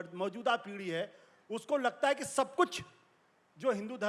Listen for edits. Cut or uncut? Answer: uncut